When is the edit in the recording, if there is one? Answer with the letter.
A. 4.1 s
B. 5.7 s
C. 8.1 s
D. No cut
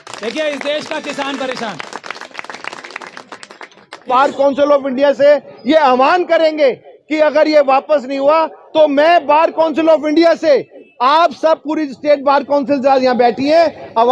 A